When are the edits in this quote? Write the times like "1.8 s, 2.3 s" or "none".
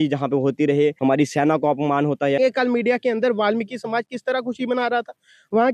1.0 s, 2.4 s